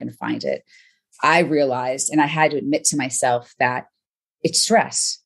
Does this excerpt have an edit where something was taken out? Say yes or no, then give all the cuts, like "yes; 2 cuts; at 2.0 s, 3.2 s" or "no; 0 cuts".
no; 0 cuts